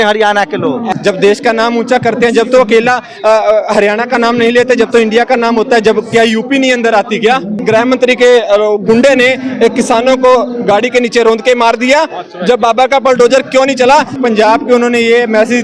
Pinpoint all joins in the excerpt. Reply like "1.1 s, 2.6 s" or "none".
0.9 s, 7.6 s, 14.2 s